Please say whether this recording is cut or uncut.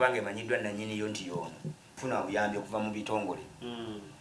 cut